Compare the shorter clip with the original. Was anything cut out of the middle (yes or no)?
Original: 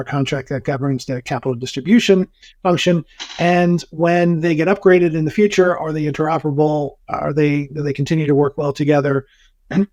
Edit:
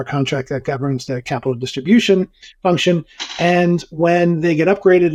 no